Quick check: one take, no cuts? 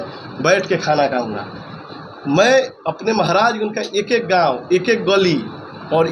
yes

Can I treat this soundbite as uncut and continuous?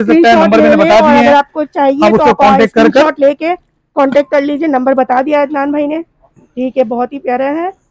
yes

